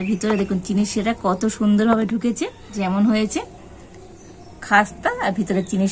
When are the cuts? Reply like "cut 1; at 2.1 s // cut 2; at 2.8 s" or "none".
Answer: cut 1; at 2.6 s